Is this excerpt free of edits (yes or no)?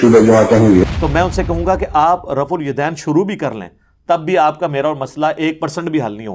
no